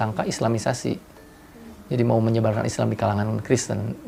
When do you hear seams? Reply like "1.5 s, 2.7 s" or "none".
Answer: none